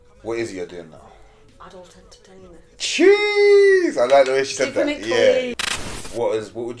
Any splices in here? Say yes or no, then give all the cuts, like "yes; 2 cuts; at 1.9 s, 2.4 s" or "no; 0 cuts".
yes; 1 cut; at 5.5 s